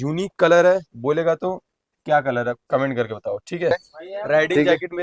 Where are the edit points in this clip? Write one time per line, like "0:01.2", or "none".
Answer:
0:03.9